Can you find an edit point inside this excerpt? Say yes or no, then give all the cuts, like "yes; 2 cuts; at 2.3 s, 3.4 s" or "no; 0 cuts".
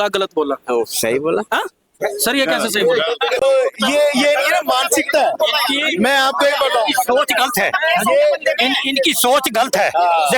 no; 0 cuts